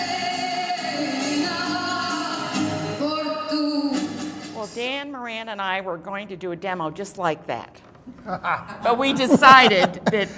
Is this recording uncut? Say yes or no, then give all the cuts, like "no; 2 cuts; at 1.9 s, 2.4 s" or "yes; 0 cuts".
no; 1 cut; at 8.0 s